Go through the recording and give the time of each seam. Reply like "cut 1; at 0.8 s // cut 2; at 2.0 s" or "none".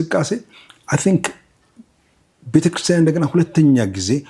none